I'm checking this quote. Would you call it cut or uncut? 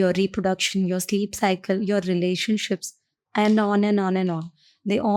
uncut